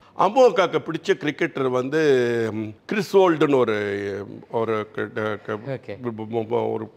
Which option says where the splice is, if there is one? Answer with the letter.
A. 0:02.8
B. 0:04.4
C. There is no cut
C